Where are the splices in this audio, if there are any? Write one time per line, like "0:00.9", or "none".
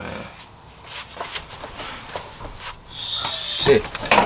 none